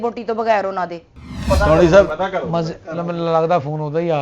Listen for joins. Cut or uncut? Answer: cut